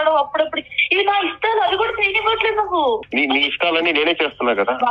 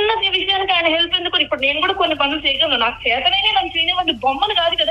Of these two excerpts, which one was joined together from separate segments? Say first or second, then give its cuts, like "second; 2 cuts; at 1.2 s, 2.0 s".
first; 1 cut; at 3.1 s